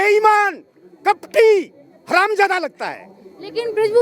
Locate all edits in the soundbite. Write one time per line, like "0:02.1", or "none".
none